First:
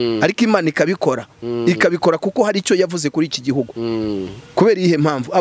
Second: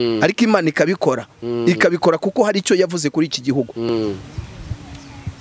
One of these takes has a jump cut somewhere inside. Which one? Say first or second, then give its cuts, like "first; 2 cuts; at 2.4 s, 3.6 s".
second; 1 cut; at 3.8 s